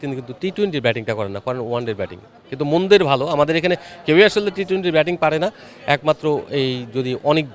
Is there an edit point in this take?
no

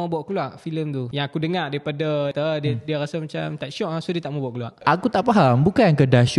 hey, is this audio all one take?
no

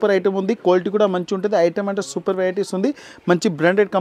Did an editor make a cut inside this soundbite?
no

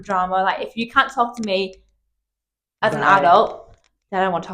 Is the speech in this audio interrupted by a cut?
no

